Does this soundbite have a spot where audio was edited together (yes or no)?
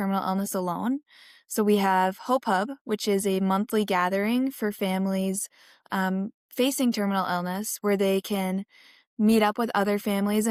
no